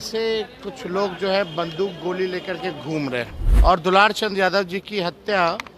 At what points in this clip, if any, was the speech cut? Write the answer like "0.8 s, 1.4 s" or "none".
3.4 s